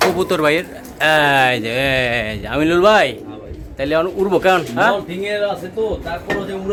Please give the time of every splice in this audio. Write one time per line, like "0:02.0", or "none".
none